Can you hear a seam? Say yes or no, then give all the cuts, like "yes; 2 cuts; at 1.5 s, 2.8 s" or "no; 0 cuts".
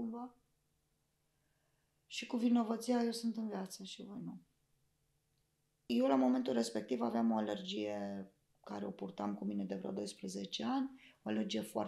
yes; 1 cut; at 5.9 s